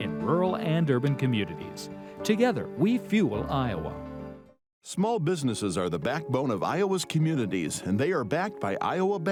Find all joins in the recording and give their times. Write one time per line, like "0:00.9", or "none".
none